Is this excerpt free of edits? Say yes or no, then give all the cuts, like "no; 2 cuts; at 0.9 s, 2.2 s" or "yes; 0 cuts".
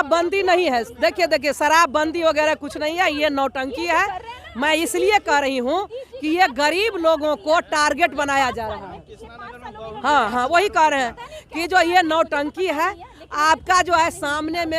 yes; 0 cuts